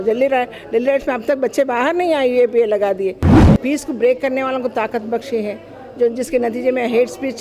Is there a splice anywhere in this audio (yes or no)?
yes